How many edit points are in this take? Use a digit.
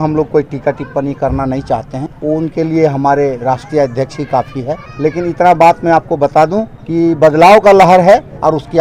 3